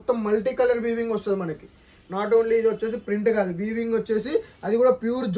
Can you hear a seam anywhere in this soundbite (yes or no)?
no